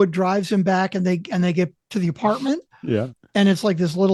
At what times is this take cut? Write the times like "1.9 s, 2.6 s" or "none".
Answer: none